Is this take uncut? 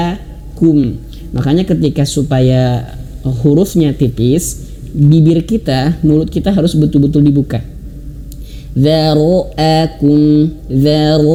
yes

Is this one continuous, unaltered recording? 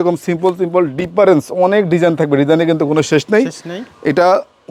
yes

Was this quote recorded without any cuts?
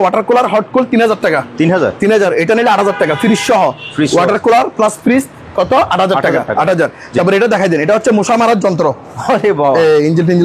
yes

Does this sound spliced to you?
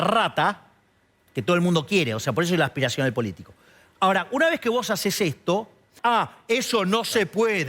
yes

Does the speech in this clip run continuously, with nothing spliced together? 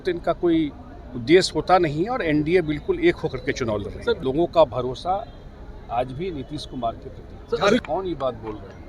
no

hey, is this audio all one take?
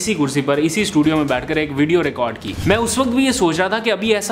no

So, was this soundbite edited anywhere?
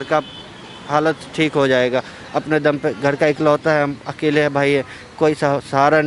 no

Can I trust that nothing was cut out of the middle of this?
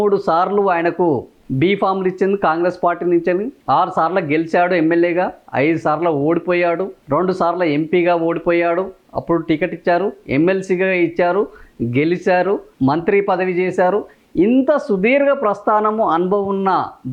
yes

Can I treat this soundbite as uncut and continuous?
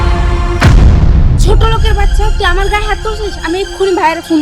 yes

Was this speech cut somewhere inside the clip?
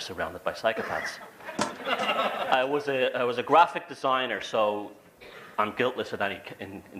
yes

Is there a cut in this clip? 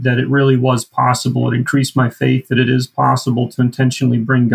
no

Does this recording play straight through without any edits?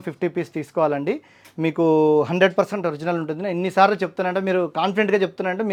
yes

